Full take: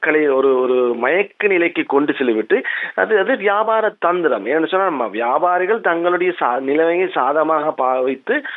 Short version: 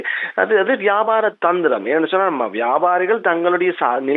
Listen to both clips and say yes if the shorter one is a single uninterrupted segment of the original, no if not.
yes